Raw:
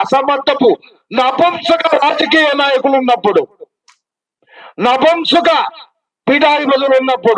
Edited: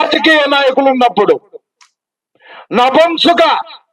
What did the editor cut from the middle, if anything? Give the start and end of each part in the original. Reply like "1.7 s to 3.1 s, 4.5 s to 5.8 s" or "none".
none

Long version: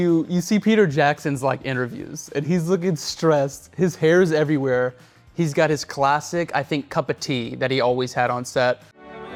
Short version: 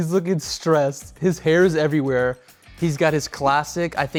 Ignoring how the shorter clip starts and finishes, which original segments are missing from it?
none

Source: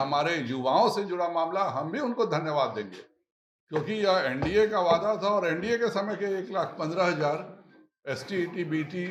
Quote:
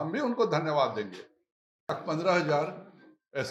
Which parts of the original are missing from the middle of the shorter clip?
3.7 s to 6.6 s

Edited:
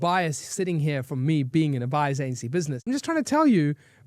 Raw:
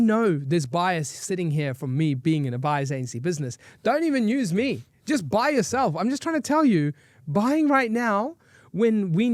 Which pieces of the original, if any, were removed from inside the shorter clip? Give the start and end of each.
3.6 s to 6.0 s

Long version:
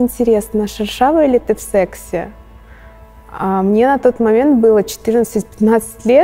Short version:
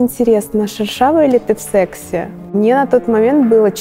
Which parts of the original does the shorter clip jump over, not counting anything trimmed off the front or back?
2.5 s to 3.6 s

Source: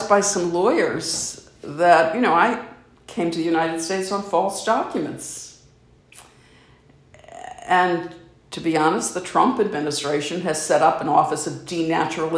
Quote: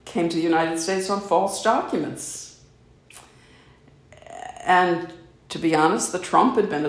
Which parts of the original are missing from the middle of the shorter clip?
none

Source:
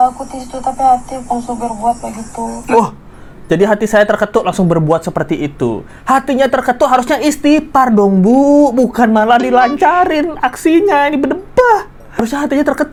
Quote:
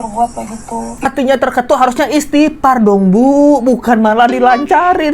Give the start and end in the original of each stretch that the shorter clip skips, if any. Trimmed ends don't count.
2.7 s to 6.2 s

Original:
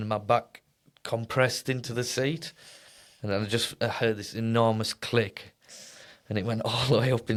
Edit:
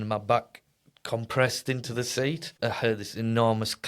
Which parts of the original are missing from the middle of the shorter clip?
2.5 s to 3.7 s

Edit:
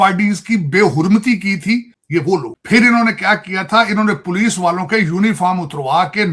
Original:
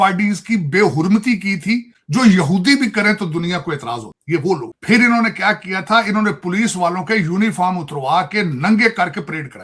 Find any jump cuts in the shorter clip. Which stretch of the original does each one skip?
2.0 s to 4.1 s

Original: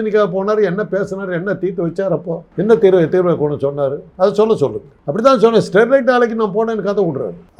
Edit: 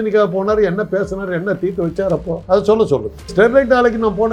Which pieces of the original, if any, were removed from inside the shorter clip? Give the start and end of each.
2.4 s to 4.1 s, 5.0 s to 5.7 s

